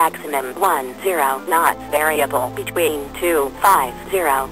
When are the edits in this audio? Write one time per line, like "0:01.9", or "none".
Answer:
none